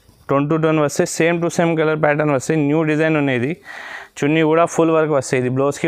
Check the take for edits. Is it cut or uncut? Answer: uncut